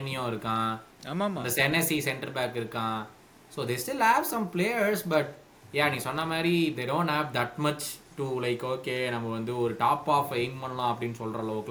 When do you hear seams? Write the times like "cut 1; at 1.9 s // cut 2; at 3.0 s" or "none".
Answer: none